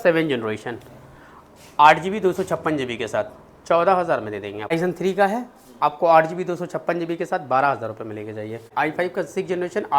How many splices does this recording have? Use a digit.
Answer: 2